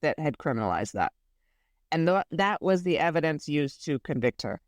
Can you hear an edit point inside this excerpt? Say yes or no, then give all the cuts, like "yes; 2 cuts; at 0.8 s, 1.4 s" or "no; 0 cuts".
no; 0 cuts